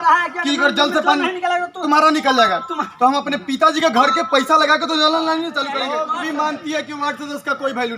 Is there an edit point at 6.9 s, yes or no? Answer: no